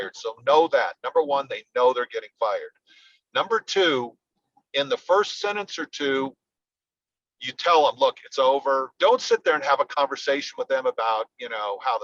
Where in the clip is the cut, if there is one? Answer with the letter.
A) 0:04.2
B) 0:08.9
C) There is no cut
B